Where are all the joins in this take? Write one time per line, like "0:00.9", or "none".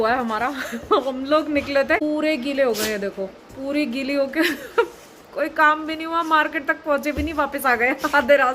0:02.0

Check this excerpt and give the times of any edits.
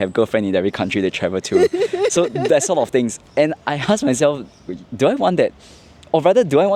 none

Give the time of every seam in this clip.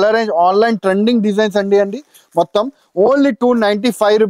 none

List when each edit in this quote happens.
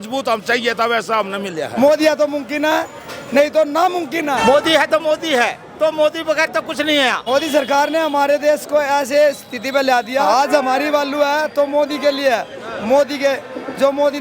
0:01.7
0:04.4
0:07.2
0:10.2

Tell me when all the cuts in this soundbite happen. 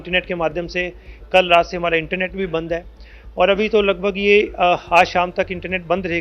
none

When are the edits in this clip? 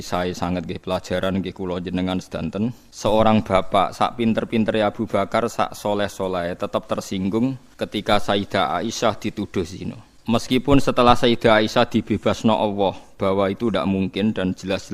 0:02.9
0:07.7
0:10.1

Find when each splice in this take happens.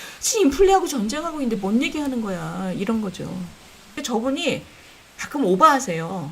0:04.0

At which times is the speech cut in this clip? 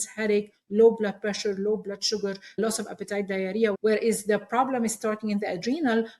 0:03.8

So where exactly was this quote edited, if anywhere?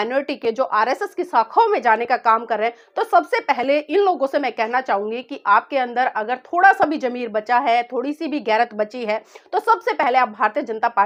none

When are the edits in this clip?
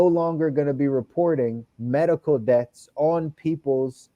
none

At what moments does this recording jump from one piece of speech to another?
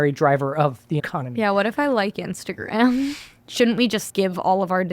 0:01.1
0:03.3

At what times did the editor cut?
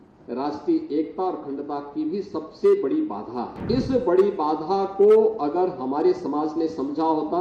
0:03.6

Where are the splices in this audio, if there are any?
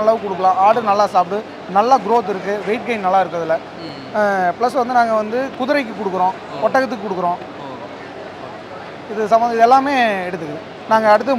none

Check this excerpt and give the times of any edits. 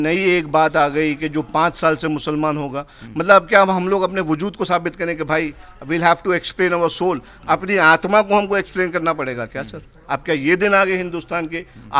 none

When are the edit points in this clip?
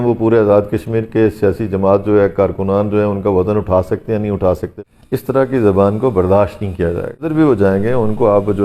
0:04.7
0:07.3

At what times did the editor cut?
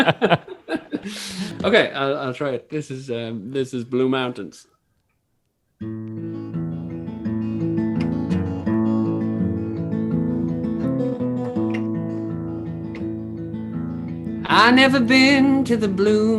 0:01.5

